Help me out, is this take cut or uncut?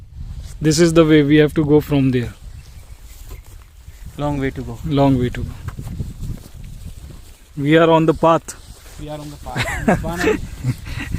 uncut